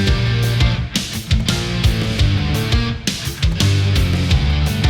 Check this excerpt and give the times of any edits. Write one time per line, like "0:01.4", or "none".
none